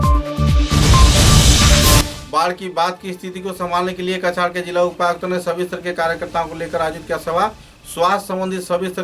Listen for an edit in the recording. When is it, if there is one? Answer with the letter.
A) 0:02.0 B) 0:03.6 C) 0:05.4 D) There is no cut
A